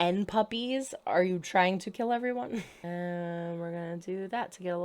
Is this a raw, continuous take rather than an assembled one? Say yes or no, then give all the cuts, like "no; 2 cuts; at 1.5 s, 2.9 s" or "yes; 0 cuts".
no; 1 cut; at 2.7 s